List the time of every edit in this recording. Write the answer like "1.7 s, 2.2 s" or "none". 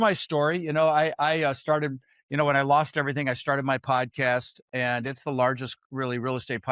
4.6 s